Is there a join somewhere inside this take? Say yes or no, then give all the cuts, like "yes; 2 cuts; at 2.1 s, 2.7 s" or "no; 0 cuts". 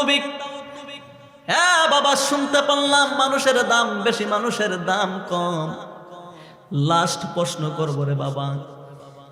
no; 0 cuts